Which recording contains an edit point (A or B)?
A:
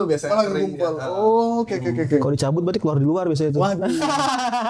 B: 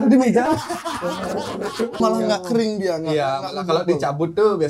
B